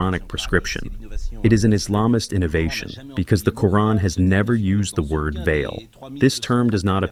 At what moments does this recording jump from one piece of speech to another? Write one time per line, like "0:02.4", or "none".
none